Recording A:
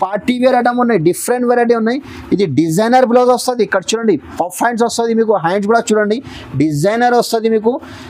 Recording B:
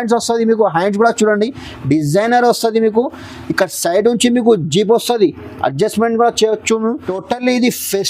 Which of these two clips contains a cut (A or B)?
B